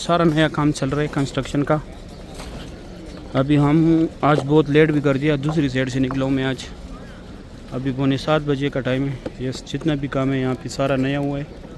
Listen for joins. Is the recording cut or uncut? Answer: uncut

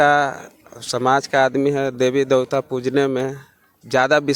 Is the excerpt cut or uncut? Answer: uncut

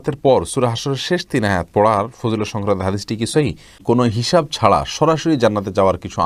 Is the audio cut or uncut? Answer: cut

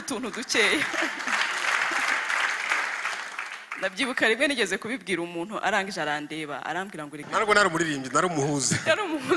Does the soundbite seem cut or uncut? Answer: cut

